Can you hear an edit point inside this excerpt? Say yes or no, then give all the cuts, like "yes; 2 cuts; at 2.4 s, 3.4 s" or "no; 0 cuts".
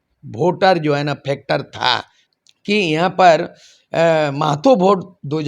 yes; 1 cut; at 2.2 s